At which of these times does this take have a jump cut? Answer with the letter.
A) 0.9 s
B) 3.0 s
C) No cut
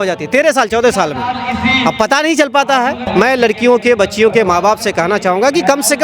B